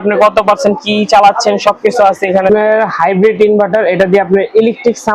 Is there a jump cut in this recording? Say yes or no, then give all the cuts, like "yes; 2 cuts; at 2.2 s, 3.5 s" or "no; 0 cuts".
yes; 1 cut; at 2.5 s